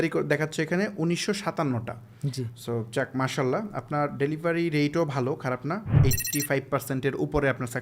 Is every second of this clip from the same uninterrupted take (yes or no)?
yes